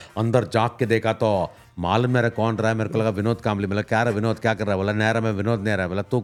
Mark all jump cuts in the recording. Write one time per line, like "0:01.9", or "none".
none